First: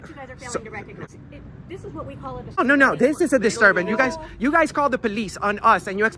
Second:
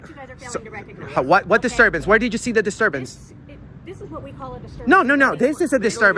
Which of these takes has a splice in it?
first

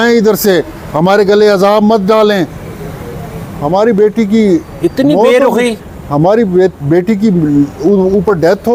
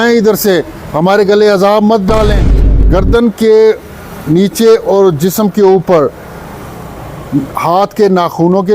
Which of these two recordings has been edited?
second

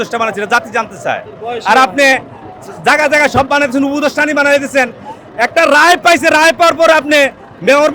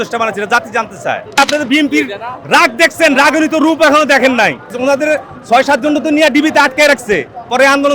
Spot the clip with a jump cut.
second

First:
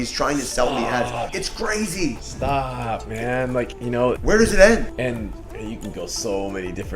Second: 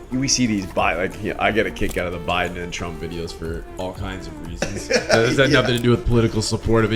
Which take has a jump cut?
first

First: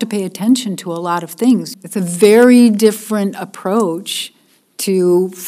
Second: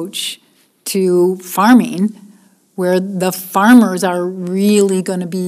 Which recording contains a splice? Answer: first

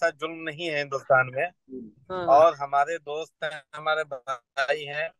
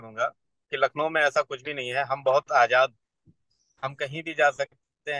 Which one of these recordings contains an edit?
second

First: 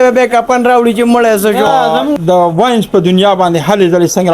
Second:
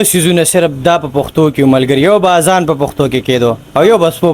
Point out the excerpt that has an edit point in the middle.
first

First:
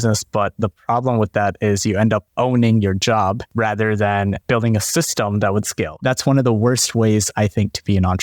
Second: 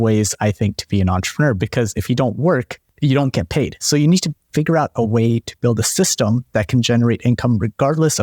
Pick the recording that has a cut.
first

